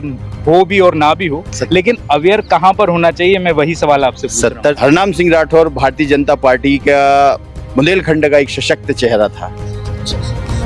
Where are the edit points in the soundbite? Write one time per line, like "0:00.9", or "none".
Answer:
0:04.8